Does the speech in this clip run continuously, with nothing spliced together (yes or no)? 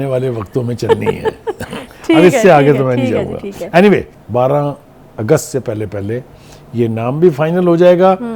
no